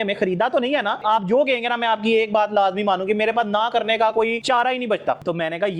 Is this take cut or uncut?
cut